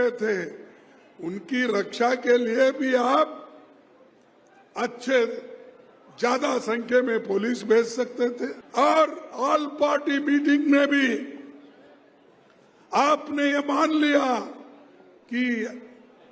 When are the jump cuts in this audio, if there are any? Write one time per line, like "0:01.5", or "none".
0:08.6